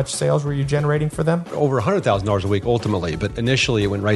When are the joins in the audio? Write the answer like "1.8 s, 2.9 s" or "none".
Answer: 1.5 s, 3.3 s